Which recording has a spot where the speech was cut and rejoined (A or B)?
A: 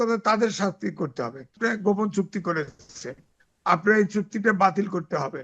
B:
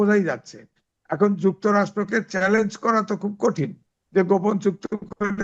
A